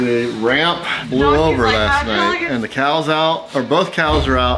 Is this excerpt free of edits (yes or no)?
no